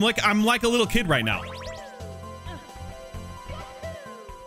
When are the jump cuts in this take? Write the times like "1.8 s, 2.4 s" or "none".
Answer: none